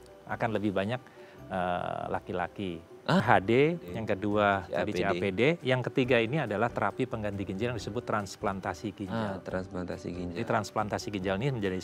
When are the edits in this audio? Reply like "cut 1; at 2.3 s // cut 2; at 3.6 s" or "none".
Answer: cut 1; at 3.2 s